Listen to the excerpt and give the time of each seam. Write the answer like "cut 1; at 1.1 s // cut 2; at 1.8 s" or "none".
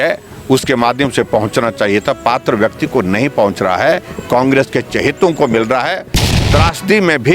cut 1; at 6.2 s